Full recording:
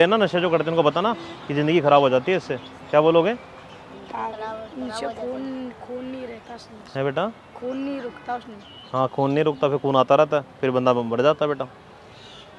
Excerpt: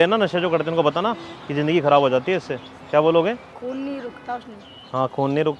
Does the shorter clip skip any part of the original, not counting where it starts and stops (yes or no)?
yes